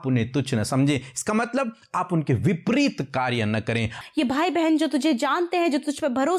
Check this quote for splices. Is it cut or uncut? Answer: cut